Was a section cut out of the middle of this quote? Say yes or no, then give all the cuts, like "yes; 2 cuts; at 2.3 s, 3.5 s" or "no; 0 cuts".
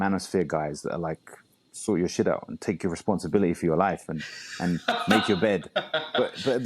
no; 0 cuts